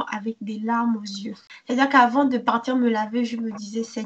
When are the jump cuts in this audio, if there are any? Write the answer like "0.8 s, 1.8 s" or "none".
1.5 s